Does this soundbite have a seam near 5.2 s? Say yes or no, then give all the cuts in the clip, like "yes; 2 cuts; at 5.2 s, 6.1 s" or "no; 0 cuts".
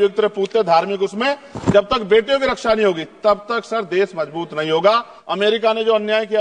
yes; 1 cut; at 5.2 s